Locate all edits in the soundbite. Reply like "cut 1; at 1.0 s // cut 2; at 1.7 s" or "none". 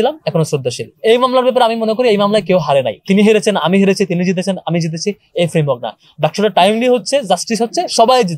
cut 1; at 0.9 s // cut 2; at 3.0 s